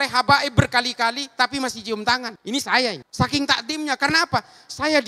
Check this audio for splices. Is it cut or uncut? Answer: cut